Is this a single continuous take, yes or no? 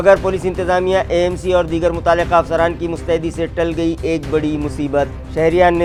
yes